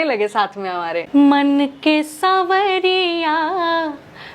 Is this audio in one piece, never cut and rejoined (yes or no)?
no